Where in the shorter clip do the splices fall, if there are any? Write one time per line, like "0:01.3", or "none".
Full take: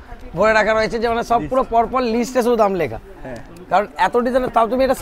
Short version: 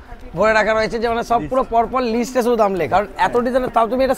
0:02.9